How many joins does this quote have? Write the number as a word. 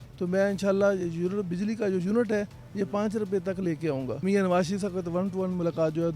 one